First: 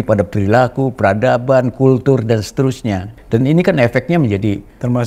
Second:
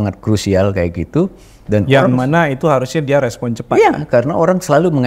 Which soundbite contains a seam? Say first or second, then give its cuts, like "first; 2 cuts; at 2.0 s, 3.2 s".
first; 1 cut; at 3.1 s